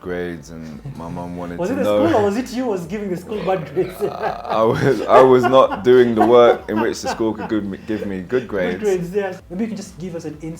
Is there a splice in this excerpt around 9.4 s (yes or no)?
yes